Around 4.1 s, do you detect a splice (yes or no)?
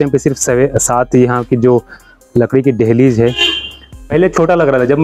yes